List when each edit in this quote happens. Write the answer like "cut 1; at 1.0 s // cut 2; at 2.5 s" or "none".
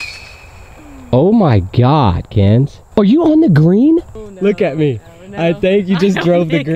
cut 1; at 4.2 s